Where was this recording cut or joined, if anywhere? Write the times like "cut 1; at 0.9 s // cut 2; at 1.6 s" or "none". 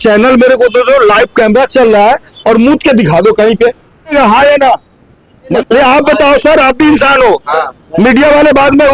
cut 1; at 4.1 s // cut 2; at 5.5 s

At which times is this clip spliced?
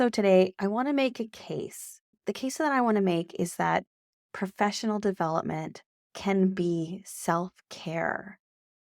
cut 1; at 2.2 s

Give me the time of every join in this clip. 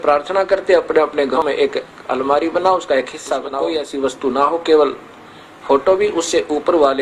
cut 1; at 1.4 s // cut 2; at 3.5 s

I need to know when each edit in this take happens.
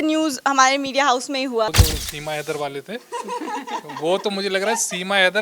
cut 1; at 1.7 s

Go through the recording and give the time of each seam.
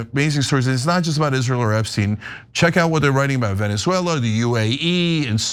none

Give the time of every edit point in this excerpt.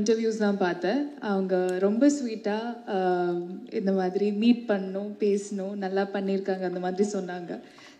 none

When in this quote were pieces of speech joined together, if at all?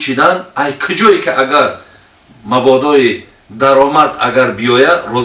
none

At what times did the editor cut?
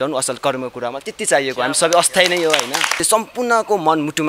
cut 1; at 3.0 s

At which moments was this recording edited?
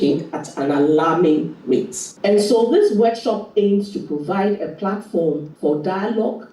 cut 1; at 1.5 s // cut 2; at 5.5 s

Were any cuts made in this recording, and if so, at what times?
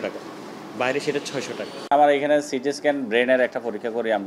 cut 1; at 1.7 s

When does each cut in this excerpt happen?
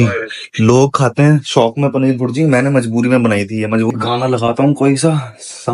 cut 1; at 3.9 s

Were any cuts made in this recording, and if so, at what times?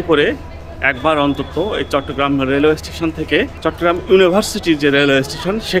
cut 1; at 3.5 s

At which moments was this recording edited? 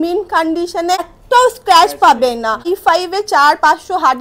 cut 1; at 1.2 s // cut 2; at 2.7 s

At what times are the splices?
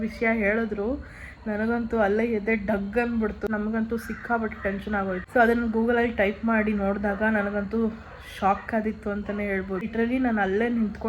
cut 1; at 3.5 s // cut 2; at 5.2 s // cut 3; at 9.8 s

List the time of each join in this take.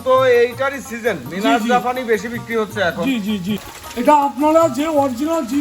cut 1; at 3.6 s

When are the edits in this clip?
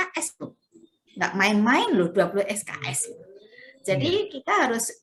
none

